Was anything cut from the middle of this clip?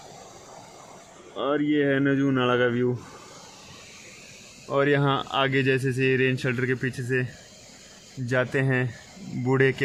no; 0 cuts

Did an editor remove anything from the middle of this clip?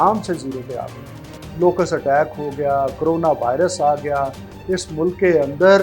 no; 0 cuts

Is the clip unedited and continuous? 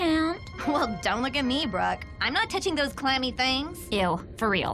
yes; 0 cuts

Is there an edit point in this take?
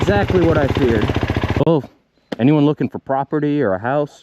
yes; 1 cut; at 1.7 s

